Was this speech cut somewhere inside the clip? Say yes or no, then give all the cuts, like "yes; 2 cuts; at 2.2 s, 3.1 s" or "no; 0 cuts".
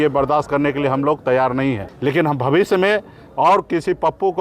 yes; 1 cut; at 1.9 s